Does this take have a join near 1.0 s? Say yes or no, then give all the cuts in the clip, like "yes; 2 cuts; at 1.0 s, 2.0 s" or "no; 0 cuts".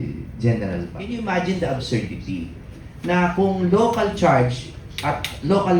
yes; 1 cut; at 1.0 s